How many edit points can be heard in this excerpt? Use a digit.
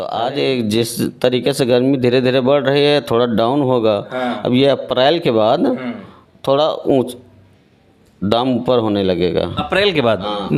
0